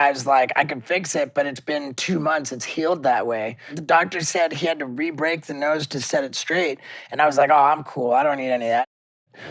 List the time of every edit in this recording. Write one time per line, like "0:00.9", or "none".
0:03.7